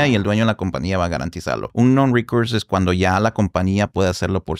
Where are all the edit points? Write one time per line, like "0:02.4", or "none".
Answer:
0:01.7